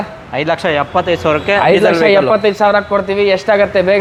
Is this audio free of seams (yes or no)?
yes